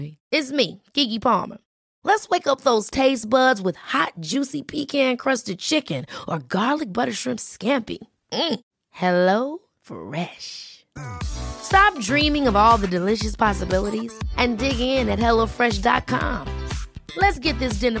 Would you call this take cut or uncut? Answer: uncut